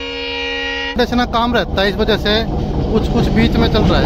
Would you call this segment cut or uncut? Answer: cut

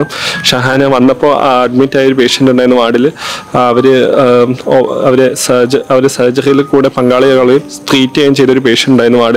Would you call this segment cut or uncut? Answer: uncut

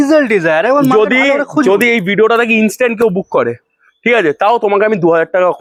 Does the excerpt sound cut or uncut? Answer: uncut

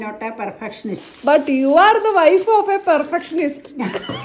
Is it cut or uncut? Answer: cut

